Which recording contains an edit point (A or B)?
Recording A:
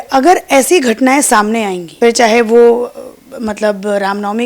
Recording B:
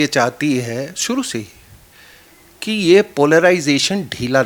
A